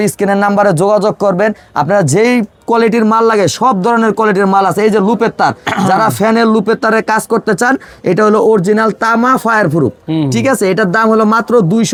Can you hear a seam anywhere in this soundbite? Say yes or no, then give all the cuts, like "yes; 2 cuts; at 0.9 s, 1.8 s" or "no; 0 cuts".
no; 0 cuts